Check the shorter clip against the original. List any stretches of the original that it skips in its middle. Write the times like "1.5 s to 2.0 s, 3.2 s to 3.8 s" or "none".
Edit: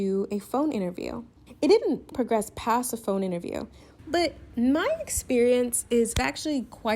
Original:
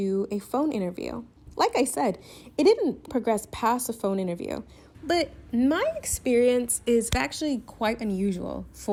1.4 s to 2.3 s